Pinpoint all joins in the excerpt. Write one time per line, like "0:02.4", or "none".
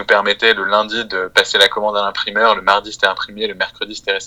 none